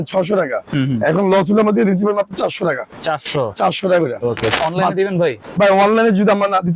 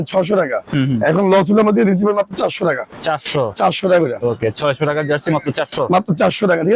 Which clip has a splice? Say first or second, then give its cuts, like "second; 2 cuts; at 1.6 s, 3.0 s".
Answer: first; 1 cut; at 4.6 s